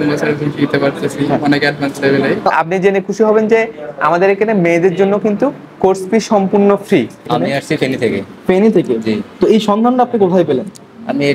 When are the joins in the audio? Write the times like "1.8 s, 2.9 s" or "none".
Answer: 2.5 s, 7.3 s